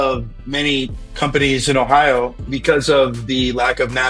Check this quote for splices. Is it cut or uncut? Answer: cut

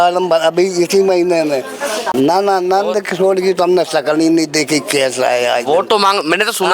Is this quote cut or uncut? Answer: cut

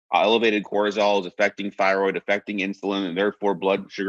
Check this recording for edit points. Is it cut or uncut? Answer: uncut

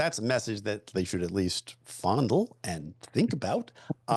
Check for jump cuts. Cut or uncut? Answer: uncut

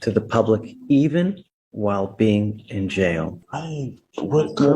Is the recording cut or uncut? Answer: cut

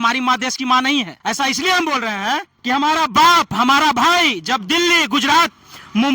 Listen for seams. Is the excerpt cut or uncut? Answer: cut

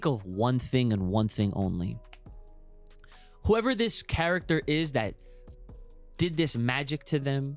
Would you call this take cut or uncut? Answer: uncut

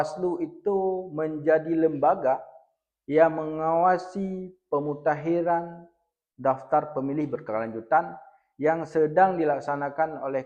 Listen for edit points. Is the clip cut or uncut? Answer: uncut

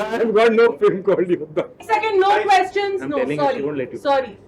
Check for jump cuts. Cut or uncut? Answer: cut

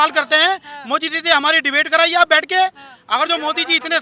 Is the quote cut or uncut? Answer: uncut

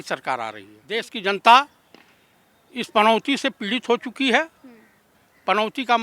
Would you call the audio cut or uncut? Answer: cut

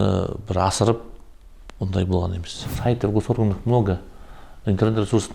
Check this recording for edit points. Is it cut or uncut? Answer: cut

